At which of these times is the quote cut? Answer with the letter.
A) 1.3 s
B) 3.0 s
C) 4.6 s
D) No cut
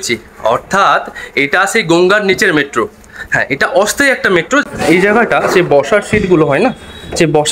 C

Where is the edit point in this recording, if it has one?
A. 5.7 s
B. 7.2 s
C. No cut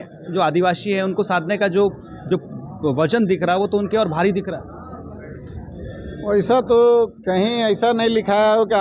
B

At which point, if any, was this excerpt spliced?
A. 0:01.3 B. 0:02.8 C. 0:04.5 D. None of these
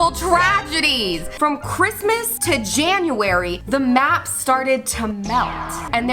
A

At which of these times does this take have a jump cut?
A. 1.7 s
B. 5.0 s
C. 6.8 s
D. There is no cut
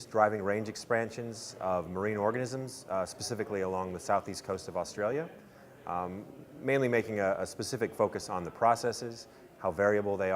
A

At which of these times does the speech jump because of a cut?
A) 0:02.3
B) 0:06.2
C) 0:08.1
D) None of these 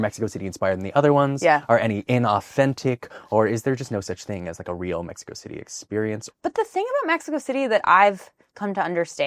B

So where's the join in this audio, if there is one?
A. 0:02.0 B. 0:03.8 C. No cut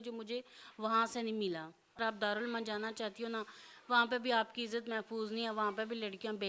A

